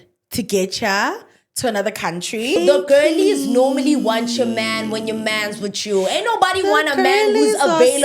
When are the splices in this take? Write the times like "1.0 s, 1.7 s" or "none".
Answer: 2.6 s